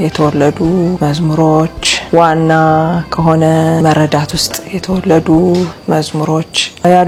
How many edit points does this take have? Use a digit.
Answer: 0